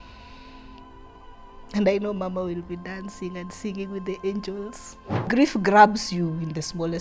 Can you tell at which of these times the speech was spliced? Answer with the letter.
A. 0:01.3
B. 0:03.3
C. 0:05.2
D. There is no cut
C